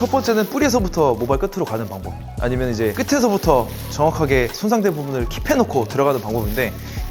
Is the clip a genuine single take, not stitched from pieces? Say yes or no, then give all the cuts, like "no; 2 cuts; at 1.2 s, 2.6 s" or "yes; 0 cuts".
no; 1 cut; at 3.0 s